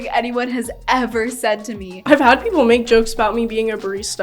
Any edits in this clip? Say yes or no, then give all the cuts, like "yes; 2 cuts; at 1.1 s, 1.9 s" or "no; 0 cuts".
yes; 1 cut; at 1.9 s